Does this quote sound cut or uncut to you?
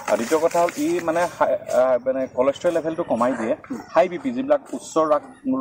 uncut